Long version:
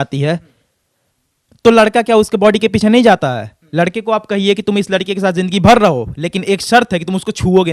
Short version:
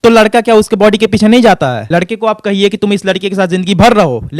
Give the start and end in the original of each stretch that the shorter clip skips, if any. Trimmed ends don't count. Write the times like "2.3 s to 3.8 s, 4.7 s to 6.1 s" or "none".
3.4 s to 3.7 s